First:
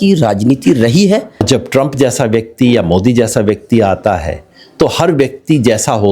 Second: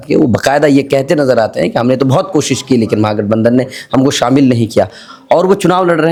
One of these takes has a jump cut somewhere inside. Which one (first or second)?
first